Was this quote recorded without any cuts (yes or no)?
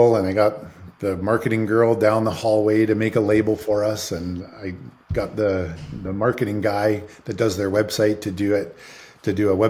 yes